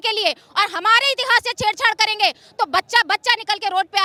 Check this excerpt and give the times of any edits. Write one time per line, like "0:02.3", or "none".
none